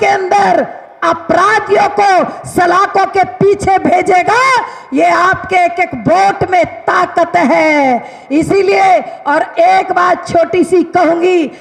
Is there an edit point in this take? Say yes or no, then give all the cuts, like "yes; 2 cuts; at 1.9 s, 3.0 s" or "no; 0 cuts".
no; 0 cuts